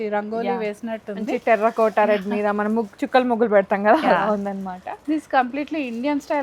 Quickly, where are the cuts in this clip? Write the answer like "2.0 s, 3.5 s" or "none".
none